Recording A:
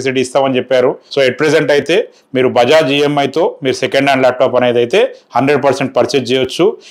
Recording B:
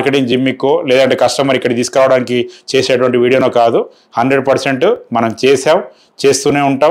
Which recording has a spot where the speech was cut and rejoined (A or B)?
A